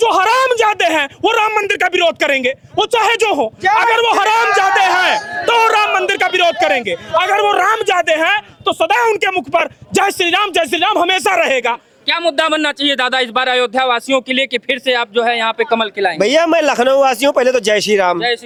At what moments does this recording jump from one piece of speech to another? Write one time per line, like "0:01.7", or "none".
none